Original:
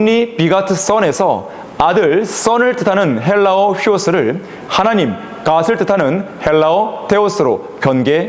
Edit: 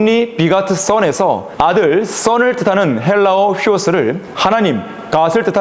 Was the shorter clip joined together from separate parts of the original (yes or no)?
yes